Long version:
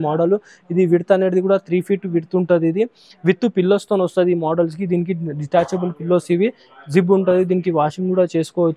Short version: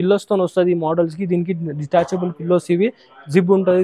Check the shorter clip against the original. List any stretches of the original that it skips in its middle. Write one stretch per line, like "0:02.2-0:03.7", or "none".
none